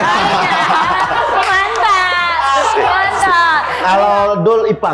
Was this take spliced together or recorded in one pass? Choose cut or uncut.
cut